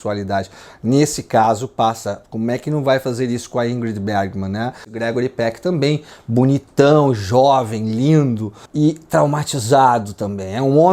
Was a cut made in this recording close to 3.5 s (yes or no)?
no